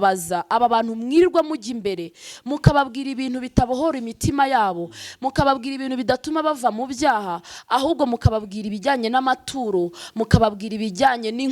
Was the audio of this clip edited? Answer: no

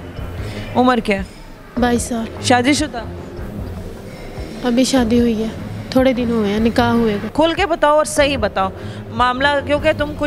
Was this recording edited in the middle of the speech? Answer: yes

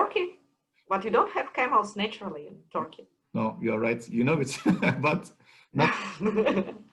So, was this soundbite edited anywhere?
no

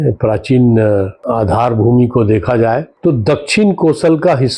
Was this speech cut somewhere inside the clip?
yes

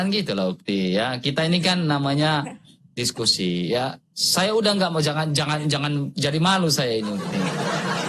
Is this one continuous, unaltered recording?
yes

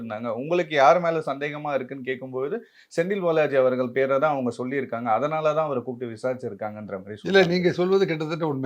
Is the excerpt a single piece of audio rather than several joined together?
yes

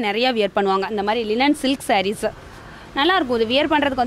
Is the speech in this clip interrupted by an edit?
no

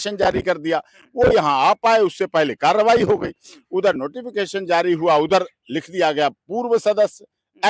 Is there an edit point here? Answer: no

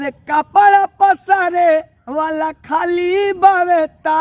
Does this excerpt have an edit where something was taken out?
no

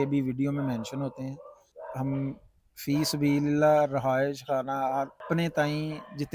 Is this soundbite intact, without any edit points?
no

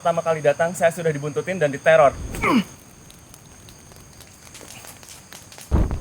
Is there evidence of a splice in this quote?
yes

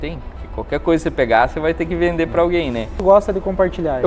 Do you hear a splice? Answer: yes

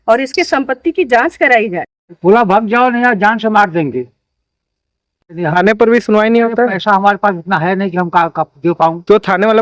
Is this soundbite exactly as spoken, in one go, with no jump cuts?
no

